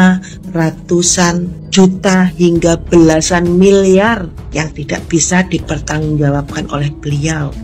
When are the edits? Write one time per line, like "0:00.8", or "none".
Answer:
0:01.6
0:04.4

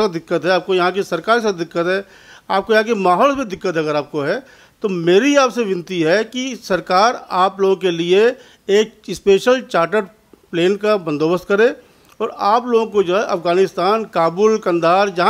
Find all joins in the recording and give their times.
none

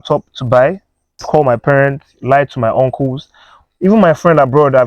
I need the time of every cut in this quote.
0:01.2

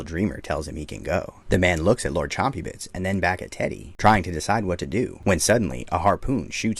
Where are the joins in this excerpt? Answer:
0:05.1

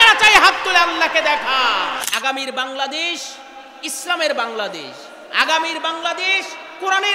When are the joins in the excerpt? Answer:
0:02.1

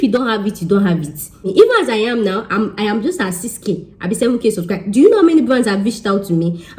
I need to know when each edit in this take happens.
0:01.4

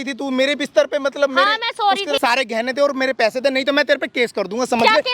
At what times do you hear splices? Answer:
0:02.2

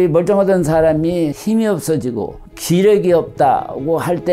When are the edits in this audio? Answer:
none

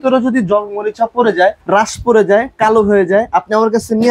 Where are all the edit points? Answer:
none

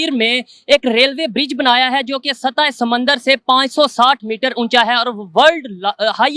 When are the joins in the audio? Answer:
none

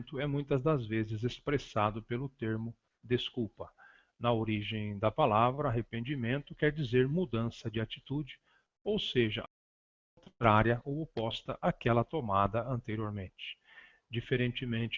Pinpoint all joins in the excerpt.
0:04.9

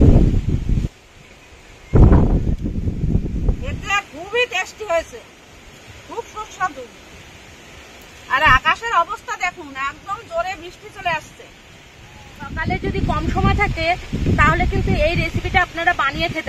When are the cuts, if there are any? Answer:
0:03.7
0:12.6

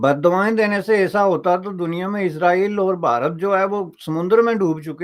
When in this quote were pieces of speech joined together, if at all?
none

